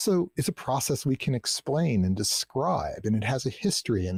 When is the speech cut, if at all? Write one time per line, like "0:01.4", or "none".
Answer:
none